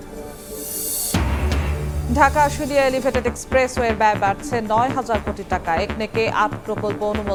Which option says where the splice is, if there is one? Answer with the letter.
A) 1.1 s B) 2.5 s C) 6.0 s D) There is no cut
D